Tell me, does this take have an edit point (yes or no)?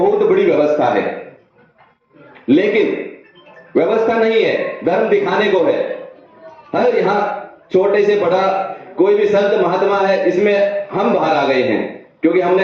no